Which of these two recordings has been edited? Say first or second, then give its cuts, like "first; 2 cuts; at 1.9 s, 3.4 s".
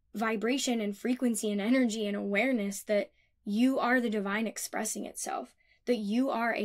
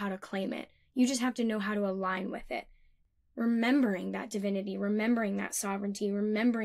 second; 1 cut; at 3.0 s